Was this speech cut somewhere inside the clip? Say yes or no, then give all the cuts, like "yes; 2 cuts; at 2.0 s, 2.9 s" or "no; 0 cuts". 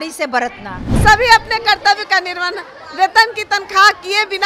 yes; 1 cut; at 1.0 s